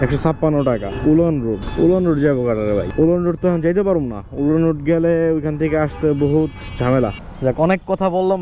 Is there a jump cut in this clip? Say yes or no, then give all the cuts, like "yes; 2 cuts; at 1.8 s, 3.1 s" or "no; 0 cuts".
yes; 4 cuts; at 0.9 s, 1.7 s, 2.9 s, 7.2 s